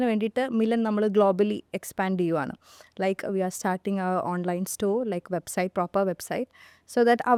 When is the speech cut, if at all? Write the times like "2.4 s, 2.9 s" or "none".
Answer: none

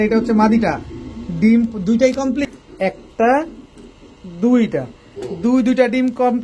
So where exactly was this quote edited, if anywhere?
2.4 s

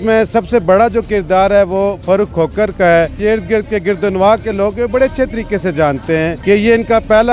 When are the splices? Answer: 3.2 s, 6.4 s

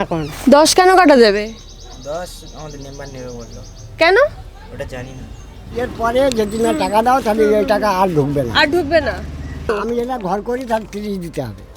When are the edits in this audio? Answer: 5.7 s, 9.7 s

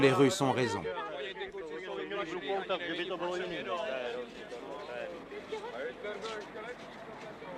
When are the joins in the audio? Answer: 2.9 s

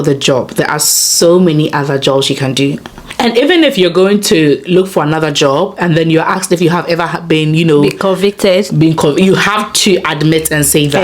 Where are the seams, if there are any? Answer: 3.0 s

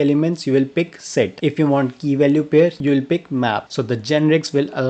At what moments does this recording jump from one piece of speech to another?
3.6 s

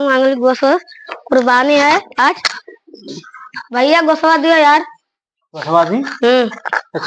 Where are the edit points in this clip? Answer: none

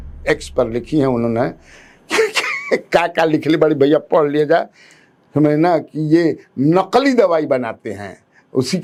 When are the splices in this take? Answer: none

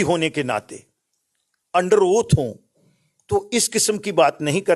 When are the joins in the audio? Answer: none

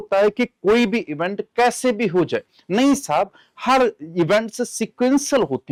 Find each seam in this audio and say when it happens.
none

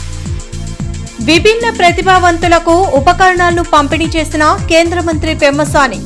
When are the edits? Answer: 0.9 s

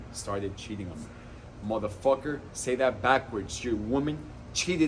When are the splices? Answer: none

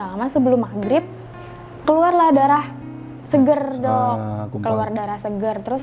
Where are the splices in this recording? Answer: none

